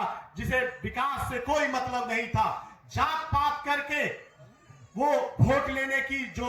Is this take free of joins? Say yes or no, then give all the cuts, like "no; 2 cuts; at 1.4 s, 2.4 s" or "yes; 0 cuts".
yes; 0 cuts